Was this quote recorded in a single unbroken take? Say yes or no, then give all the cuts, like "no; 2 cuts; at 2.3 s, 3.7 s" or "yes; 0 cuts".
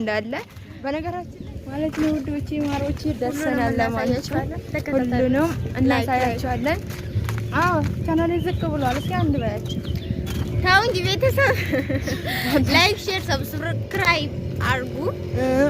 no; 1 cut; at 1.3 s